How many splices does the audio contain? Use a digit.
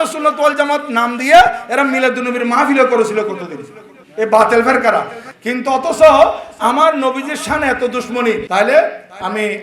1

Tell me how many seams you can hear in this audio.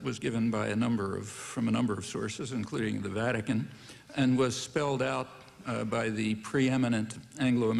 0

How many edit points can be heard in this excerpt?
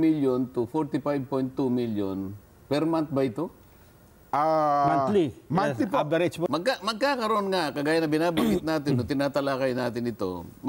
1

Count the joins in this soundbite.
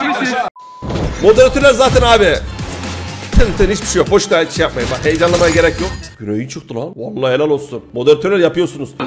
1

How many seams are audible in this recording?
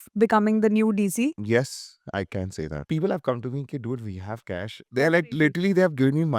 3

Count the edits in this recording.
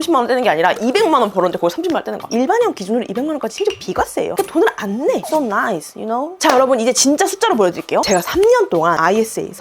3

